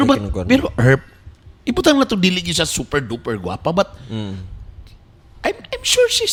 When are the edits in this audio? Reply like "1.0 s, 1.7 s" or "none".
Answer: none